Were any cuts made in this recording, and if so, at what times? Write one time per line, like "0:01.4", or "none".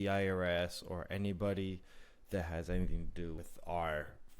0:03.4

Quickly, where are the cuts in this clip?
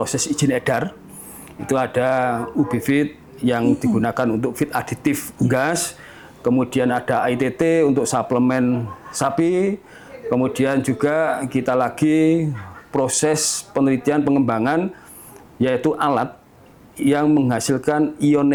none

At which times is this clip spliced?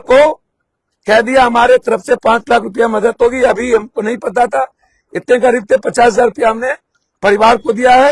none

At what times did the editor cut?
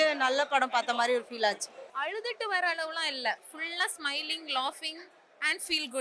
0:01.8

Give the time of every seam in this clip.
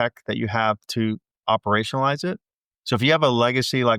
0:01.3

